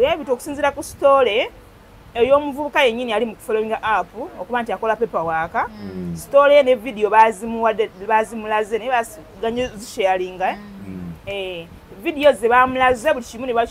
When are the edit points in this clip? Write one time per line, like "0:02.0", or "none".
none